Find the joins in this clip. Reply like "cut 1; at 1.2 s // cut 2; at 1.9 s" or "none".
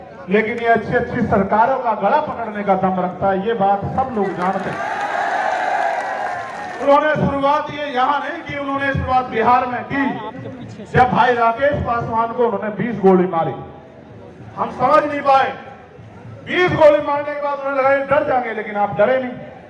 cut 1; at 6.9 s